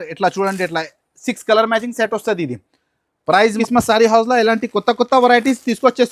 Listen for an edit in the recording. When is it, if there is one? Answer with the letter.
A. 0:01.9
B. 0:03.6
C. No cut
B